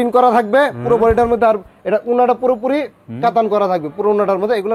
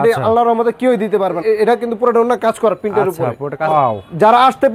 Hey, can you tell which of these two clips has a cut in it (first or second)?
second